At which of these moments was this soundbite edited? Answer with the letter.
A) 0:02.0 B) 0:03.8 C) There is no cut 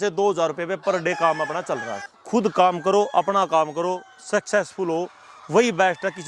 A